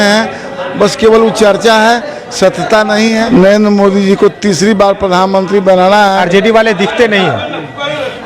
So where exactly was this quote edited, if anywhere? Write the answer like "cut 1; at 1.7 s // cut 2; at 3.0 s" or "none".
cut 1; at 3.2 s // cut 2; at 6.2 s